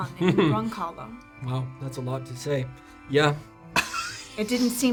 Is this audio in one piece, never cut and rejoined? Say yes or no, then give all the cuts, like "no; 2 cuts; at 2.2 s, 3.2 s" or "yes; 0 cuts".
yes; 0 cuts